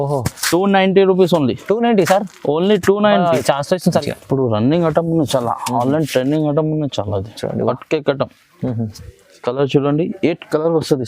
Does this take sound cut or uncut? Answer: cut